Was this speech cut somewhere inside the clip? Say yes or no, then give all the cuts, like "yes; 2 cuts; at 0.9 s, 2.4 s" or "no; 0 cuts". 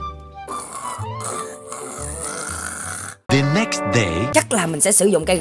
yes; 1 cut; at 4.3 s